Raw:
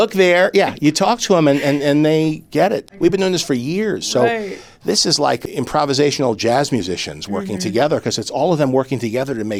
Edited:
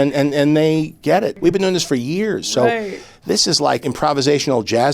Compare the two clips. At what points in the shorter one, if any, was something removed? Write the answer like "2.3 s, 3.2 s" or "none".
1.4 s, 3.8 s